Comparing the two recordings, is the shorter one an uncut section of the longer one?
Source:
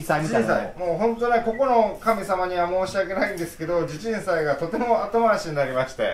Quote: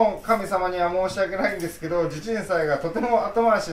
yes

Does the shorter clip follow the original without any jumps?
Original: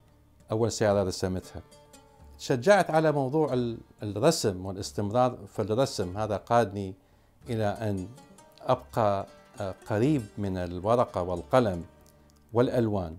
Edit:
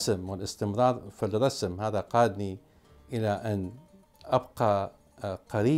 yes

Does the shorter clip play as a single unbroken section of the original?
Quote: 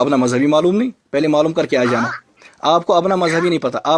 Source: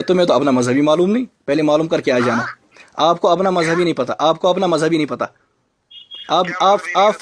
yes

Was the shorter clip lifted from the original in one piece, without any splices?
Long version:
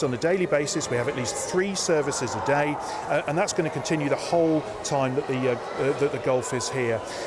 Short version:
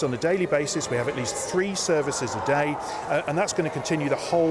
yes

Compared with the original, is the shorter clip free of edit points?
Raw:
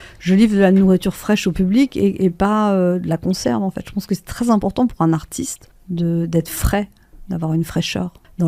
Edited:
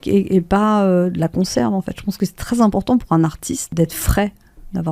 no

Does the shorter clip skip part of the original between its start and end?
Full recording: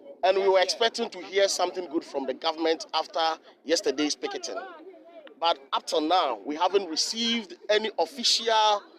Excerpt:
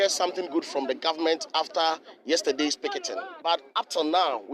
yes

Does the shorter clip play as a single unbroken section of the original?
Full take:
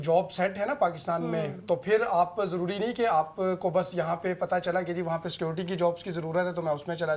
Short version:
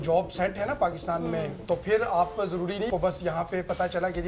no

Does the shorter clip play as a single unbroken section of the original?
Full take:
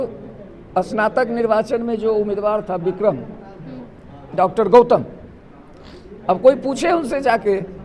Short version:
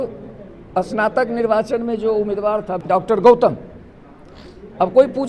no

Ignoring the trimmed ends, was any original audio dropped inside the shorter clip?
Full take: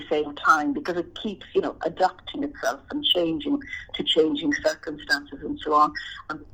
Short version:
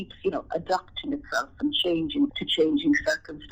yes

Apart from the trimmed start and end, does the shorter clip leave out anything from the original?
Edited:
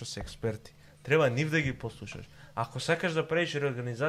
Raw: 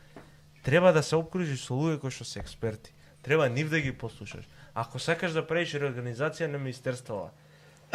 no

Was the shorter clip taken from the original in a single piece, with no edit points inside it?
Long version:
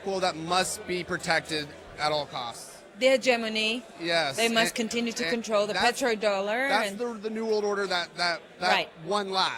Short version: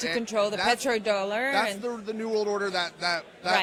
yes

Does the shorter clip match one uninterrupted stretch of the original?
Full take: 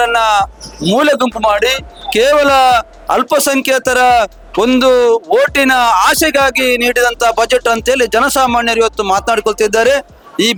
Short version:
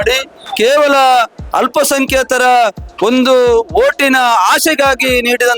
yes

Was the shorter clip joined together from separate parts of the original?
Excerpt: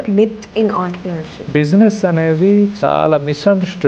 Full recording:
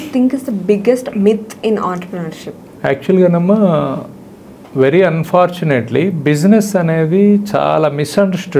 yes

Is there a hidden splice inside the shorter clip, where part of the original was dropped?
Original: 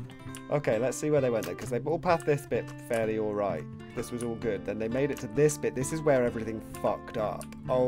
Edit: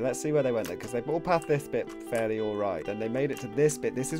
yes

